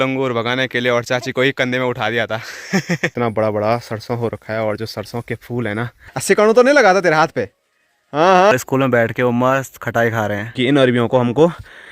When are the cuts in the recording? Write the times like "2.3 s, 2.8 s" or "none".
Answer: 3.1 s, 6.1 s, 8.5 s, 10.5 s